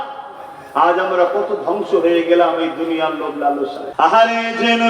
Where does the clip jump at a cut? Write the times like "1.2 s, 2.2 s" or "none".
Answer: 3.8 s